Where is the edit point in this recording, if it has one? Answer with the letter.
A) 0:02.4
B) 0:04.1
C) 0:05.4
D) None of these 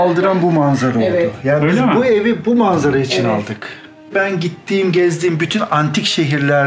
B